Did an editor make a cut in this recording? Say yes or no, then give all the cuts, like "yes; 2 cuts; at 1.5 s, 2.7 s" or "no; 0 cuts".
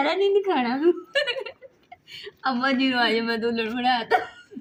no; 0 cuts